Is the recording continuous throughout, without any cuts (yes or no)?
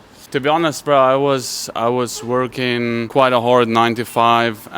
yes